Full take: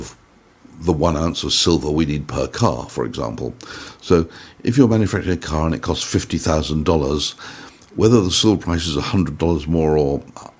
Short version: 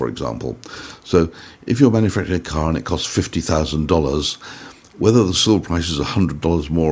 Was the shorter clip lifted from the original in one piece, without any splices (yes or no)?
yes